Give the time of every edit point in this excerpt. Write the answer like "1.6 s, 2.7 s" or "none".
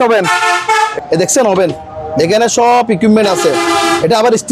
0.9 s

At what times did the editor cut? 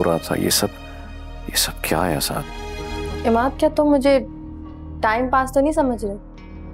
3.1 s

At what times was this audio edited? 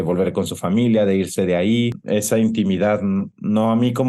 2.0 s

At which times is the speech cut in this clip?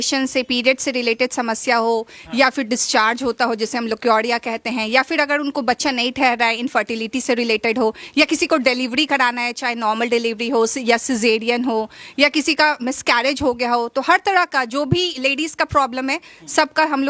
none

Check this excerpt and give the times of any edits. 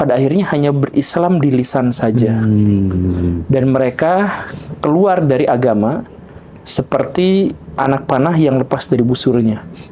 none

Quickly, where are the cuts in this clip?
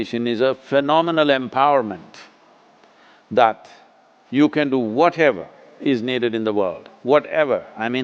none

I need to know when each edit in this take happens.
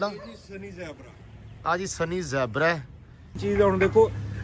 3.4 s

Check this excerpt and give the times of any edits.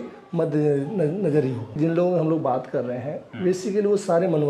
1.8 s

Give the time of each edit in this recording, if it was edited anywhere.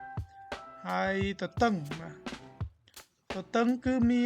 2.2 s, 3.3 s

